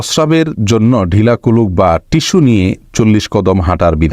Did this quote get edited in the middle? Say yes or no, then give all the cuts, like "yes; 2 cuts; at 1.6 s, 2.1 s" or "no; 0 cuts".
no; 0 cuts